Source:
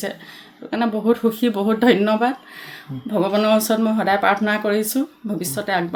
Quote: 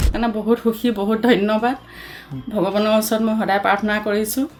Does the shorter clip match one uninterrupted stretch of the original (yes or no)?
yes